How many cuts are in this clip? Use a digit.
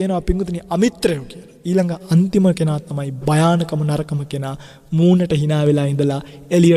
0